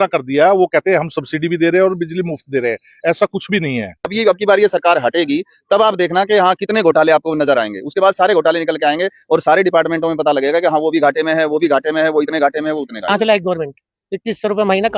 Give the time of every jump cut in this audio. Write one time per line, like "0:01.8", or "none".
0:04.1
0:13.0